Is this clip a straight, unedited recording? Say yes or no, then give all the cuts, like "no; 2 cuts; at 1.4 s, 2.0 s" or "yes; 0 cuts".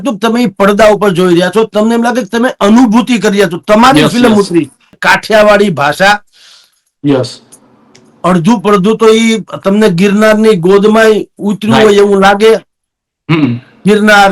no; 1 cut; at 4.9 s